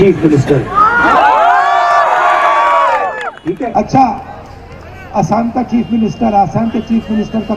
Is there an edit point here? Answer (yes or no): yes